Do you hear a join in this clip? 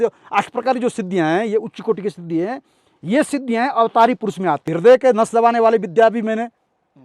yes; 1 cut; at 4.7 s

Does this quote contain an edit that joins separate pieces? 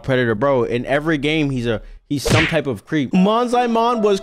yes; 1 cut; at 3.1 s

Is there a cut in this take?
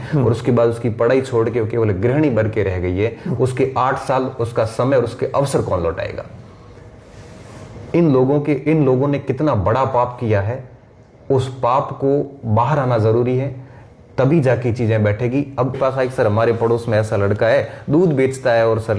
yes; 1 cut; at 15.8 s

